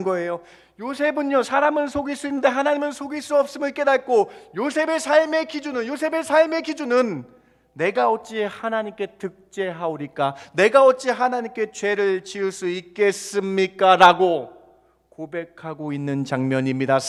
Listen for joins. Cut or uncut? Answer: uncut